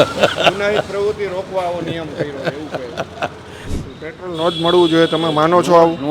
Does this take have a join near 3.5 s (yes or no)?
yes